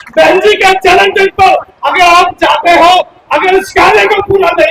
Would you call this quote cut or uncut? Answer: uncut